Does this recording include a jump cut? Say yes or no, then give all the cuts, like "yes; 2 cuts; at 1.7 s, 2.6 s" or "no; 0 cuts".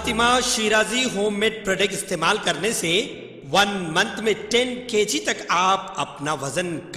no; 0 cuts